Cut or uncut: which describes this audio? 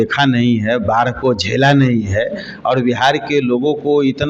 uncut